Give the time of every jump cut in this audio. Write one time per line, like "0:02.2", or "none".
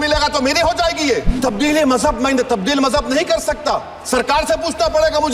0:01.3